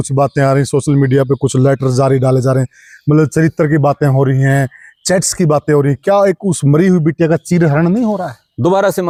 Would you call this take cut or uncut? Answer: uncut